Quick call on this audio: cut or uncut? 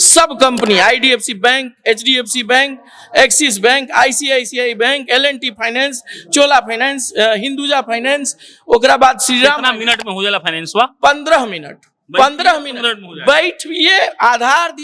uncut